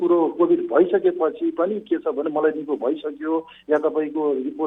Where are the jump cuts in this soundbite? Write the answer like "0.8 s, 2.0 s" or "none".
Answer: none